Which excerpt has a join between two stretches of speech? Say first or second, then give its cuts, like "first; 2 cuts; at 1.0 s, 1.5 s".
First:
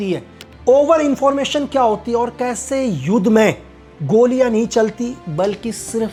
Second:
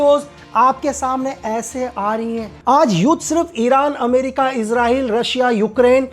second; 1 cut; at 2.5 s